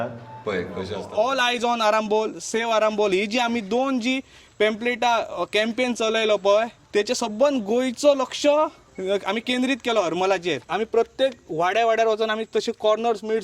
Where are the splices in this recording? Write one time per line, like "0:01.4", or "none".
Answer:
0:01.0
0:06.8
0:08.9
0:10.6